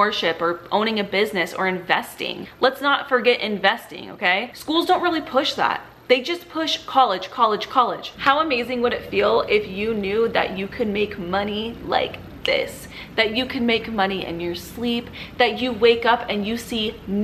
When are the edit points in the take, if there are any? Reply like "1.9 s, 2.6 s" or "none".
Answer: 2.4 s, 8.1 s